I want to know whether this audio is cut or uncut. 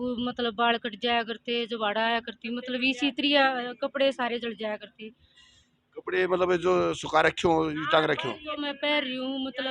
uncut